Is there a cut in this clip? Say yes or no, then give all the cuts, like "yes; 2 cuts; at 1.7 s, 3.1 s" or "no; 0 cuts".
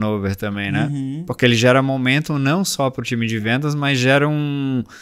no; 0 cuts